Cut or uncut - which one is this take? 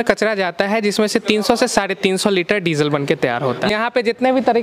cut